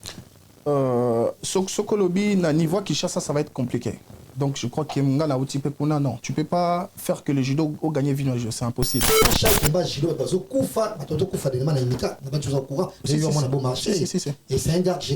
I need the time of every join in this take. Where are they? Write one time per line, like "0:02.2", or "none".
0:09.1